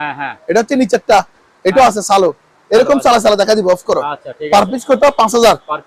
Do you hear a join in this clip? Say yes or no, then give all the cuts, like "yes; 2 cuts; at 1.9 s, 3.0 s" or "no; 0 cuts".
no; 0 cuts